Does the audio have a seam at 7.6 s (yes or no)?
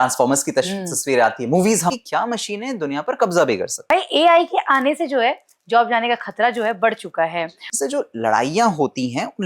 yes